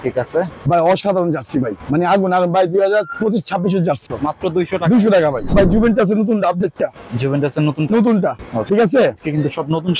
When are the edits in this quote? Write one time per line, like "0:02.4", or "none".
0:01.8
0:04.0
0:05.4
0:08.5